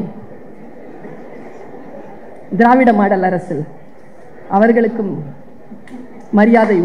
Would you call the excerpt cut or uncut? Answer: uncut